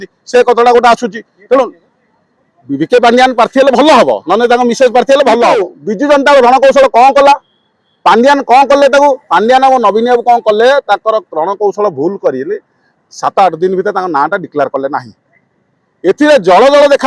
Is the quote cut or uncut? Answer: cut